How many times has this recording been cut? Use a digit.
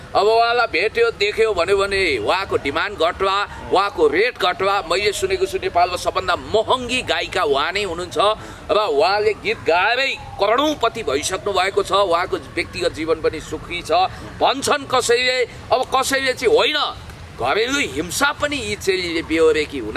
0